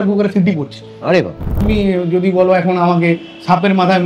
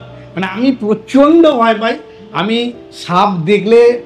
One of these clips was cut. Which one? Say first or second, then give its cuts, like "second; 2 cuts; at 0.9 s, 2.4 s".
first; 1 cut; at 1.6 s